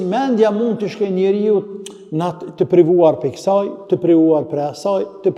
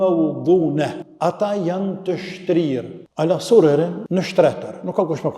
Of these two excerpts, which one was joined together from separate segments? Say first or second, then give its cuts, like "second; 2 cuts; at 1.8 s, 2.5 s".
second; 3 cuts; at 1.0 s, 3.0 s, 4.0 s